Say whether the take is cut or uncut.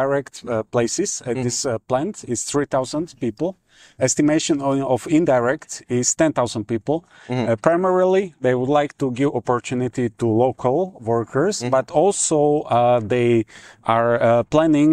uncut